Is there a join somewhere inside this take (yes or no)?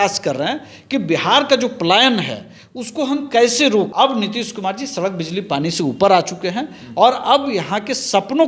yes